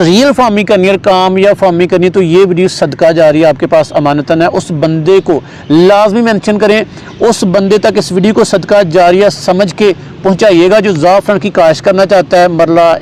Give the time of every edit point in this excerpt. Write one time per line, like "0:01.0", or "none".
none